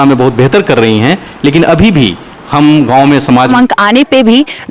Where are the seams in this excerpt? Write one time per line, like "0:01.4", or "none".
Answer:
0:03.5